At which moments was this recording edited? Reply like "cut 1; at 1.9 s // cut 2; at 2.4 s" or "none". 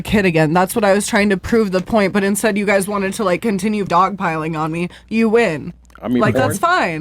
cut 1; at 3.9 s